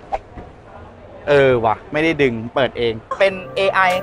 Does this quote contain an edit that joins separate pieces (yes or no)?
yes